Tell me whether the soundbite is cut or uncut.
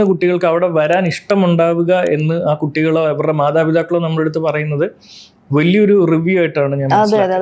uncut